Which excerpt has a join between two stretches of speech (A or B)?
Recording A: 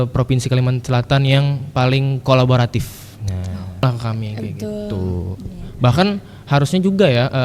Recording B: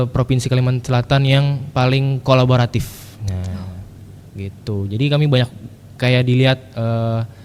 A